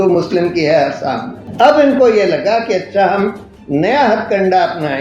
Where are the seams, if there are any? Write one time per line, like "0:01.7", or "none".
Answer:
0:01.4